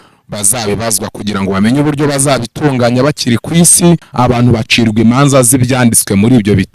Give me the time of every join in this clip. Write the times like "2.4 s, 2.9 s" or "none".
4.1 s